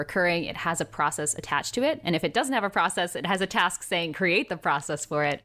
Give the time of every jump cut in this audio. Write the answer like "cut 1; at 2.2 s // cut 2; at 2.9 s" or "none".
none